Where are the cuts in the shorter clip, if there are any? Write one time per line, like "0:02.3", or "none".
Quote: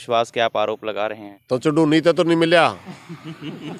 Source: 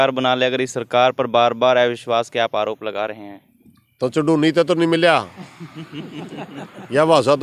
0:01.3